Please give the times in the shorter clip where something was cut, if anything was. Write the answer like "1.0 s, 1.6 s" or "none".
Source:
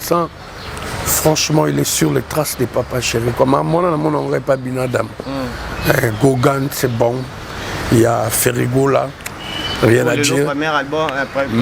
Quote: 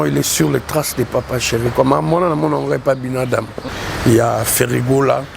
3.6 s